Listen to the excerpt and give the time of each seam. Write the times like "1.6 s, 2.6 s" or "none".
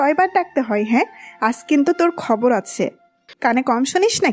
3.3 s